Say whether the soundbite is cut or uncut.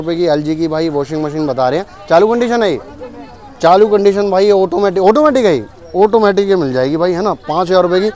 uncut